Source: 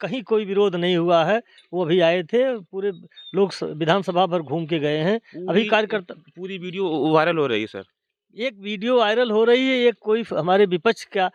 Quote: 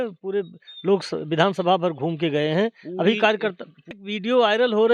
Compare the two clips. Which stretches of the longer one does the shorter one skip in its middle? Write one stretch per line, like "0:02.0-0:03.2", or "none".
0:06.5-0:08.6